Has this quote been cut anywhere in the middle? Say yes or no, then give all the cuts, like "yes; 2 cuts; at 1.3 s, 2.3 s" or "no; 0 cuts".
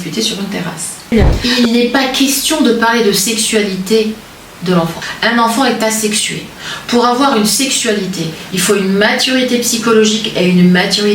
yes; 1 cut; at 1.4 s